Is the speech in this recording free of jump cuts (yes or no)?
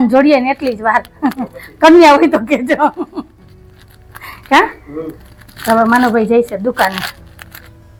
yes